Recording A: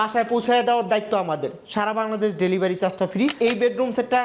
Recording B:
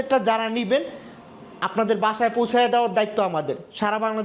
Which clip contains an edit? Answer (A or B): A